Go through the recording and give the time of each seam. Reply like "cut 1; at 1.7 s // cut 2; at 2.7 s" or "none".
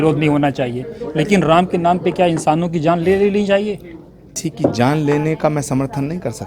cut 1; at 4.4 s